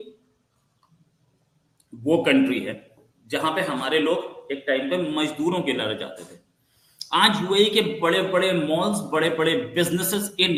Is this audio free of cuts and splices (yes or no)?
yes